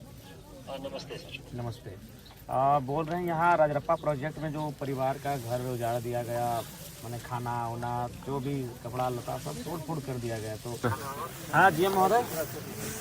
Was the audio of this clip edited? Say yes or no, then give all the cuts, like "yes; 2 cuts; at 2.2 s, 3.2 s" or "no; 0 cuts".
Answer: yes; 1 cut; at 10.8 s